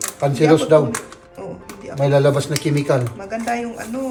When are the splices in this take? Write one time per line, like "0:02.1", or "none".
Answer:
none